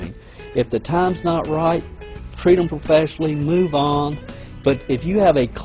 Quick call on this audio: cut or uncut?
cut